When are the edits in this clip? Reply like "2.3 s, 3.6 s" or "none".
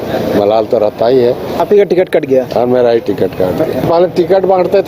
1.6 s, 3.8 s